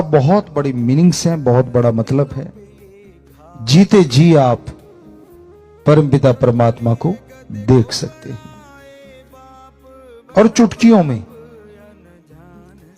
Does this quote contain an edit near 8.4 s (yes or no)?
yes